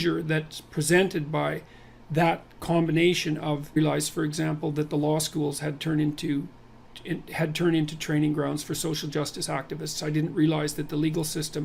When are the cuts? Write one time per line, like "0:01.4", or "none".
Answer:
none